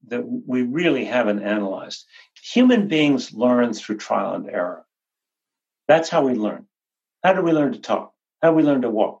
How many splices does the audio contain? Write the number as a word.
one